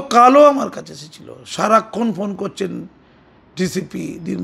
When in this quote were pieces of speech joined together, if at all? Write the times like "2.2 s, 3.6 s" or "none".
none